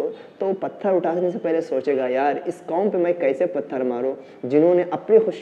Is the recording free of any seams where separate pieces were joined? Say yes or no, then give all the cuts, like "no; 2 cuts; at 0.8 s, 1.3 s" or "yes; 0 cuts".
yes; 0 cuts